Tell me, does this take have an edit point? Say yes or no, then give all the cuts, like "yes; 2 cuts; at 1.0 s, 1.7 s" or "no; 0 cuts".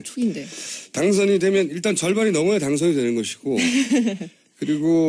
yes; 1 cut; at 3.9 s